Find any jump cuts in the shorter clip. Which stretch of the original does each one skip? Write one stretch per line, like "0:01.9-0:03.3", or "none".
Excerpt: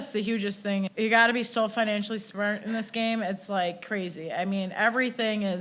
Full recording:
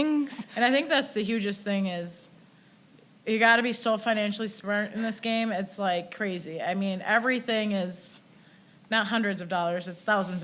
0:01.9-0:03.2